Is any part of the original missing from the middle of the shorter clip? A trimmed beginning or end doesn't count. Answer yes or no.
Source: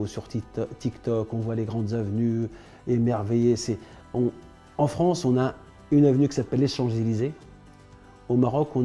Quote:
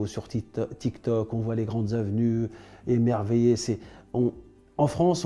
no